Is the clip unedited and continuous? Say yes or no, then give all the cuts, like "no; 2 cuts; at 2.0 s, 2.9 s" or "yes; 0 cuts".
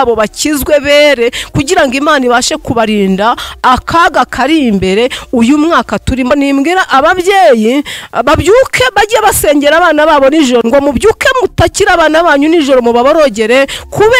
no; 2 cuts; at 6.3 s, 10.6 s